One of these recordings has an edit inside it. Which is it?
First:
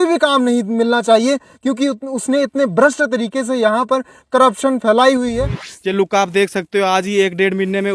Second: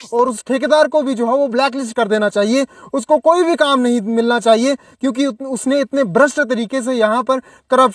first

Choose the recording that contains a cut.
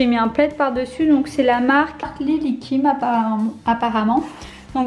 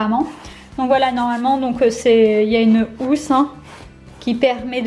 first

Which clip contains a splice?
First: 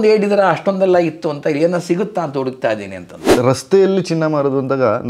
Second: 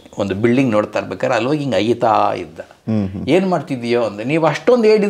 first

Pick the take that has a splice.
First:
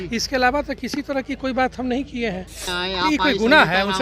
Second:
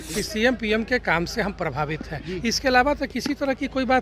first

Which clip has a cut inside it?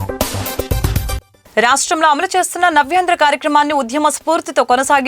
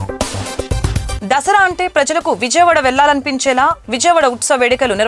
first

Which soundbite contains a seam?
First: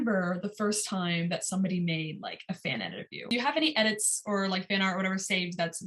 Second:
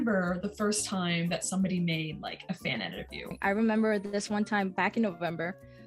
first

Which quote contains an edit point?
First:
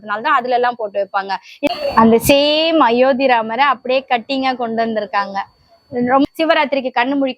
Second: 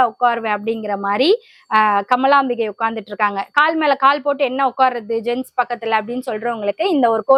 first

